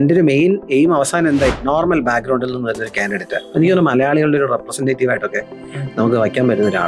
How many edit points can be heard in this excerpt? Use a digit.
1